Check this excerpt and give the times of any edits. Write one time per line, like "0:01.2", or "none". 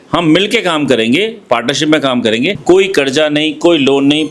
0:02.6